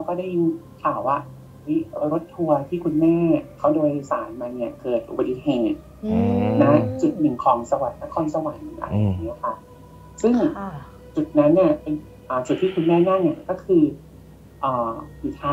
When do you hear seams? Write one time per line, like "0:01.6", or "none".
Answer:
none